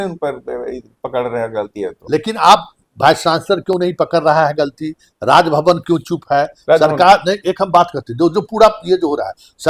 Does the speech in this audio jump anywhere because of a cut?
no; 0 cuts

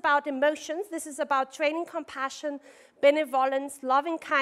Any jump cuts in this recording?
yes; 1 cut; at 2.7 s

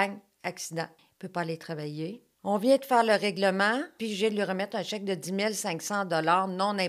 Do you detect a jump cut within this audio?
yes; 3 cuts; at 1.0 s, 2.3 s, 4.0 s

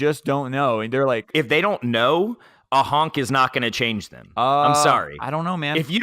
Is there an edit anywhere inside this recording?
yes; 1 cut; at 1.2 s

